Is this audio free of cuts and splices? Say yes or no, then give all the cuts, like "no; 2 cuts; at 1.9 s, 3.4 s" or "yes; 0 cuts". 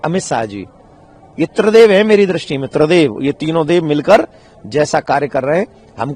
yes; 0 cuts